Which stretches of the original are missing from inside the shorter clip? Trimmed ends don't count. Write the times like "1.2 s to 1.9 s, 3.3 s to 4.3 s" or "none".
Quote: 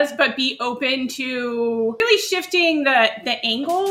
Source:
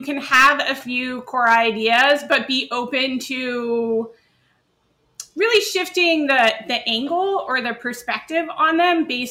4.1 s to 5.4 s